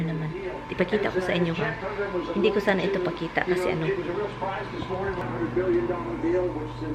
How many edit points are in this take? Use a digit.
0